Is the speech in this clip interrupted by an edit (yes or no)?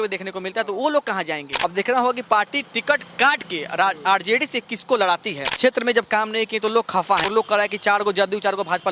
yes